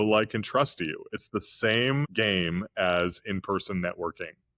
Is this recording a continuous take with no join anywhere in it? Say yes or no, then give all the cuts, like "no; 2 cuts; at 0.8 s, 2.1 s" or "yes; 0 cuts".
no; 1 cut; at 2.1 s